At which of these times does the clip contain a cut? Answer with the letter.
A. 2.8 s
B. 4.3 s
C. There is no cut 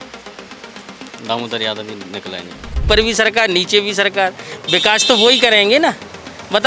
A